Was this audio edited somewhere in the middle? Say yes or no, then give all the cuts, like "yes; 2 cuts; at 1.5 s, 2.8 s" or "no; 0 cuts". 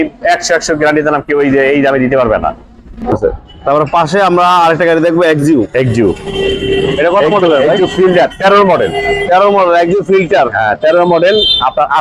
yes; 1 cut; at 3.1 s